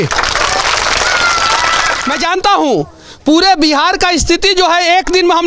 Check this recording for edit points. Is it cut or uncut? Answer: cut